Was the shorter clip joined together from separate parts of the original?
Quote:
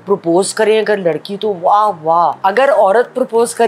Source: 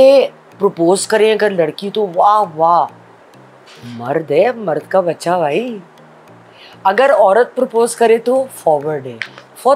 yes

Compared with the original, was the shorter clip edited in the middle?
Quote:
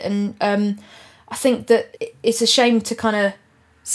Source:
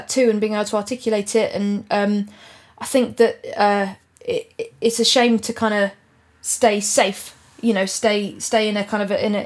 yes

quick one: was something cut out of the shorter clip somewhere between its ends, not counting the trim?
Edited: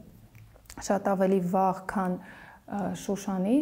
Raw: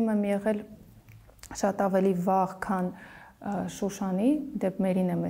no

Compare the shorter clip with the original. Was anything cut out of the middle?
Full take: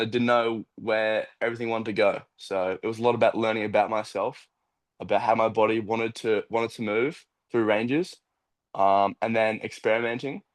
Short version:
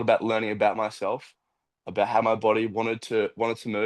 no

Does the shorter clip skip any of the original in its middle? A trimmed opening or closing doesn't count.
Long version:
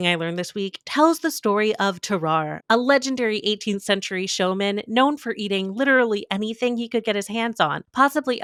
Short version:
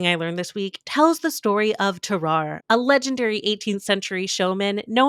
no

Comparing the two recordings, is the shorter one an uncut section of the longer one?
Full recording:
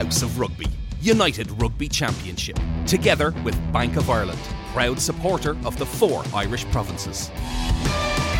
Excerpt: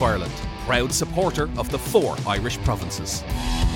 yes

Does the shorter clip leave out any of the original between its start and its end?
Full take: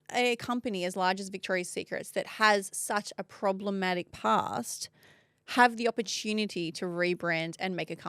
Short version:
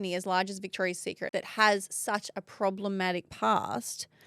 yes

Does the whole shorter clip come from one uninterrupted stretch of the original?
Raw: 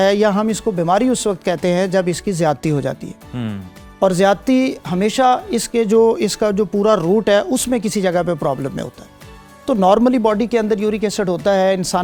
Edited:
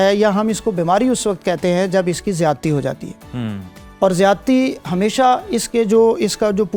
yes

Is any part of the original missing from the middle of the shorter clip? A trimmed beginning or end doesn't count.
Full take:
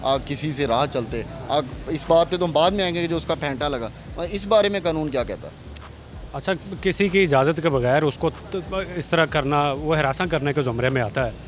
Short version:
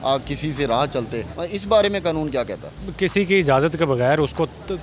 yes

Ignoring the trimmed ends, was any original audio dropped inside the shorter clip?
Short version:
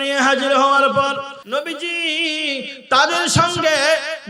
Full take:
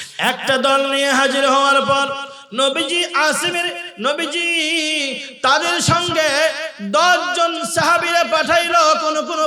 yes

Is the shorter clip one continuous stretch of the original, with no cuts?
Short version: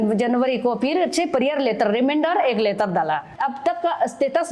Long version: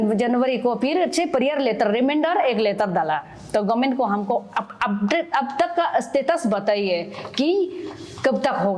no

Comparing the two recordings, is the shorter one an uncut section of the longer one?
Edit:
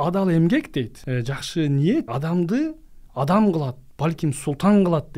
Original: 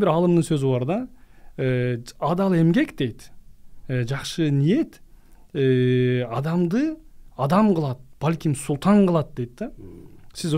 no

